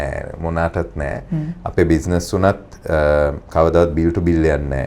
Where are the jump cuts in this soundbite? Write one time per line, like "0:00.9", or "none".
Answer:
none